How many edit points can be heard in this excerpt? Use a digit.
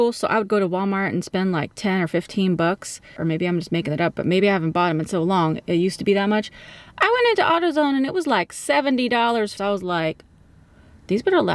2